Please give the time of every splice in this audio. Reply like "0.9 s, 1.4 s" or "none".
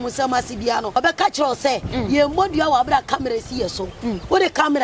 1.0 s